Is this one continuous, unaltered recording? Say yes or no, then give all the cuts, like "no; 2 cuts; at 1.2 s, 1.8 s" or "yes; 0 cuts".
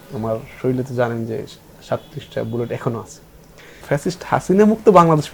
no; 1 cut; at 3.8 s